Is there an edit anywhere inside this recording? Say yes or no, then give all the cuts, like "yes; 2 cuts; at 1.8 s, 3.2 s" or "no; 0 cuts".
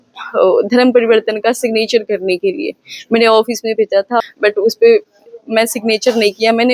yes; 1 cut; at 4.3 s